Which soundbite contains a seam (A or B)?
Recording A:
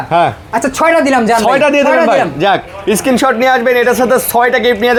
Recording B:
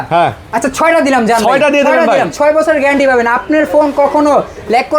B